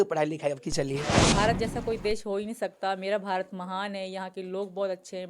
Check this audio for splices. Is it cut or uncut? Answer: cut